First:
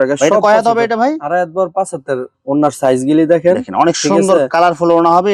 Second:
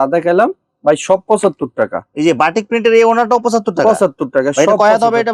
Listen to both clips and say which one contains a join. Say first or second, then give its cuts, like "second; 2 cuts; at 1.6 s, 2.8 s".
first; 1 cut; at 2.3 s